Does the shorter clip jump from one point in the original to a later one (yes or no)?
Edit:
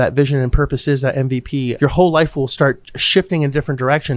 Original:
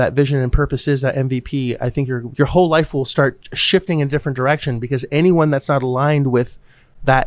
yes